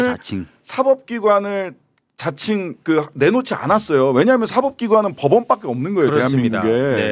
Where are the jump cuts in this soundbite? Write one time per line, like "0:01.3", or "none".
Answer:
none

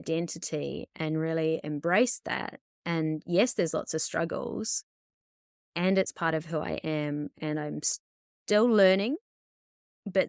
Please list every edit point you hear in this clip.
none

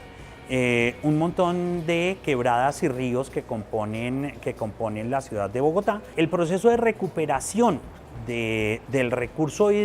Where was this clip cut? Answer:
0:06.1

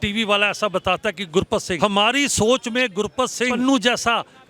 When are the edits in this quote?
0:01.8
0:03.6

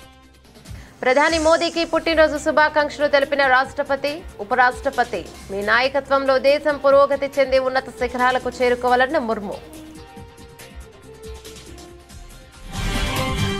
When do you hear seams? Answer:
0:00.9
0:09.6

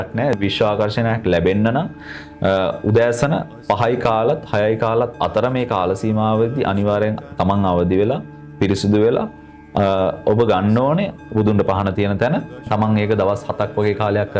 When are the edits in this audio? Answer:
0:11.2
0:12.7

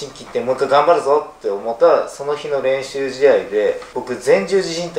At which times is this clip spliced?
none

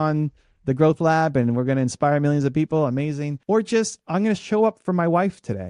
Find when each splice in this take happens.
0:03.3

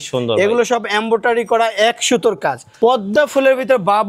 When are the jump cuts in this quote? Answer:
0:02.6

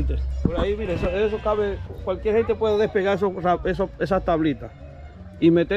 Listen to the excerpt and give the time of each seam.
none

